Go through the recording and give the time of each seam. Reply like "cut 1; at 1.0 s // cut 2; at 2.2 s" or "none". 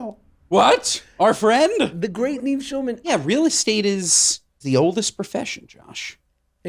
cut 1; at 1.9 s // cut 2; at 3.1 s // cut 3; at 4.6 s